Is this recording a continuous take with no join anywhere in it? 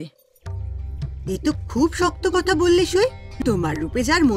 no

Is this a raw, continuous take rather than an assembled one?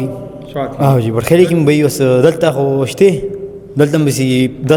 yes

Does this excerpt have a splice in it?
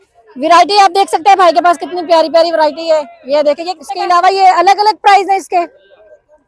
yes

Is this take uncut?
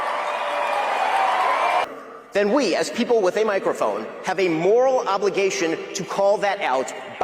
no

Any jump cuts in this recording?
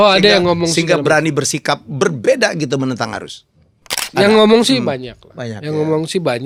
no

